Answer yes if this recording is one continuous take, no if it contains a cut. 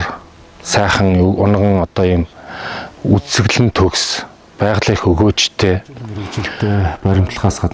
no